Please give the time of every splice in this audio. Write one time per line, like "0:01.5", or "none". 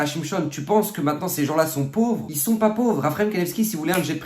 0:02.3